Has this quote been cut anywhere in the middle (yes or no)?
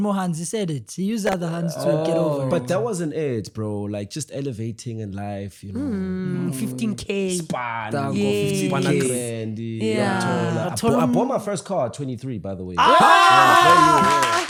no